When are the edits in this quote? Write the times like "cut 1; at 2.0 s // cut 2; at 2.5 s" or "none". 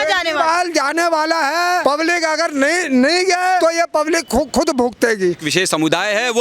cut 1; at 1.8 s // cut 2; at 3.6 s // cut 3; at 5.4 s

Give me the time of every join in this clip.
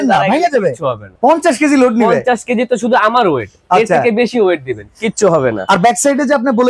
cut 1; at 1.0 s

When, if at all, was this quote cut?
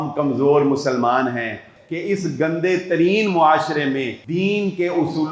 cut 1; at 1.8 s // cut 2; at 4.2 s

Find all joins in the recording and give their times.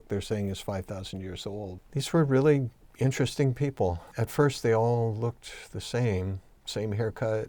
cut 1; at 1.8 s // cut 2; at 4.1 s // cut 3; at 6.5 s

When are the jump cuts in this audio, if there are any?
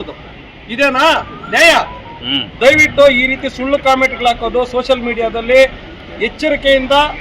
cut 1; at 2.4 s

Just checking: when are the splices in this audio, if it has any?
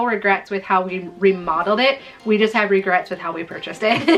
none

